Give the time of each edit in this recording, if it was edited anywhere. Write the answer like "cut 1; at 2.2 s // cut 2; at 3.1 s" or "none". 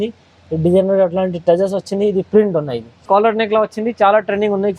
cut 1; at 3.0 s